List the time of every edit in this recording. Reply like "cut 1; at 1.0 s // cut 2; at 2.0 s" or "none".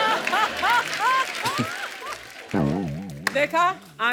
none